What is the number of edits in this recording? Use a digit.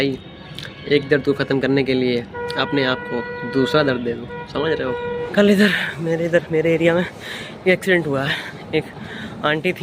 1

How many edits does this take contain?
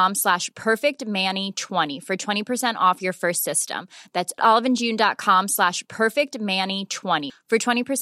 1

